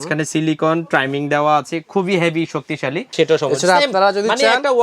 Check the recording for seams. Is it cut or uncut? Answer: cut